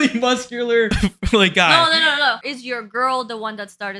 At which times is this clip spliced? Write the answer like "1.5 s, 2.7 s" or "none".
0.9 s, 2.5 s

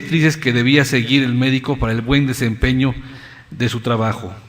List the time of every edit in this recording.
2.9 s

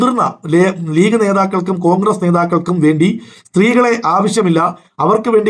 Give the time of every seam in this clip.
none

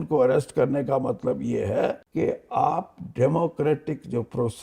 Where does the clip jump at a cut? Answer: 2.0 s

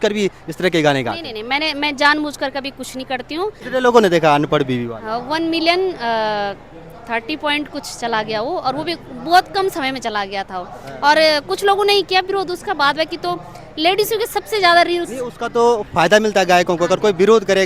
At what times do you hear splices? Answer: 3.6 s

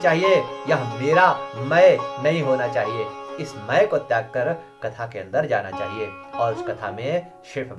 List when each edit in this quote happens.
none

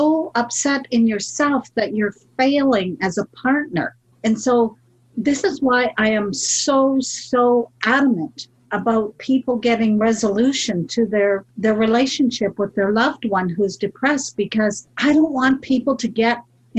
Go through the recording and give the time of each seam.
4.0 s, 11.5 s, 14.9 s

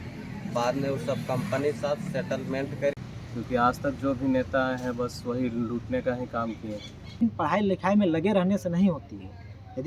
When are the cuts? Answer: 3.0 s, 7.2 s

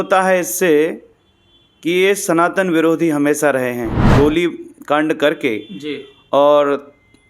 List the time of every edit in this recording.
4.1 s

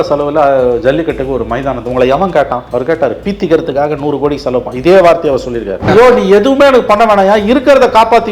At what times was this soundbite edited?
2.6 s, 5.9 s

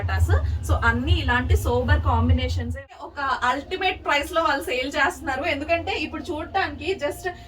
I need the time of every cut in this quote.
2.7 s

